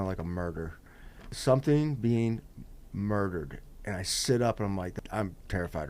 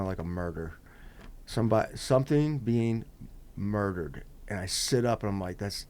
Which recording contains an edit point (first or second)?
first